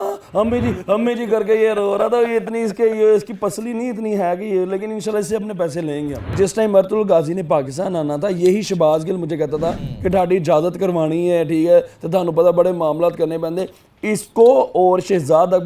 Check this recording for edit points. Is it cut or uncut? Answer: cut